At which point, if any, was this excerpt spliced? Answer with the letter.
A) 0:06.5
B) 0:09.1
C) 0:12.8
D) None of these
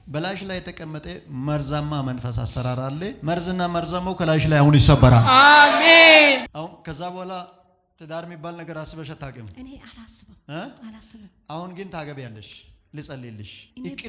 A